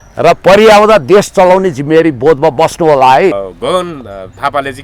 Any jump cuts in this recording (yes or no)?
yes